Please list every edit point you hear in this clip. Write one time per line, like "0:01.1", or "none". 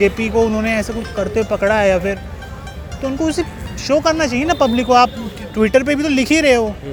none